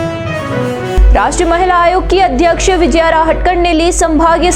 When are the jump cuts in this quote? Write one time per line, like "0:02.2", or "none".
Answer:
0:00.9